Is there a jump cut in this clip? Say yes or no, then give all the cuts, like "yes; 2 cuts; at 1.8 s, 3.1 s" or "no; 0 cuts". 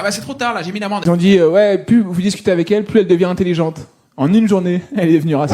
yes; 1 cut; at 1.0 s